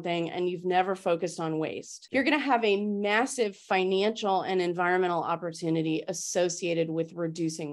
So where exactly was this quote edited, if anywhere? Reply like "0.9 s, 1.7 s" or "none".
none